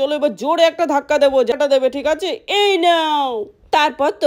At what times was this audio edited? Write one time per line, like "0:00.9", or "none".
0:01.5